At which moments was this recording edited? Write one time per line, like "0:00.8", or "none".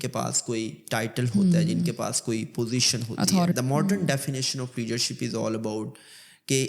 0:03.5